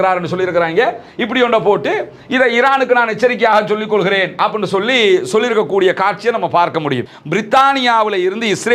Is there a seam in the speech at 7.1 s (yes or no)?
yes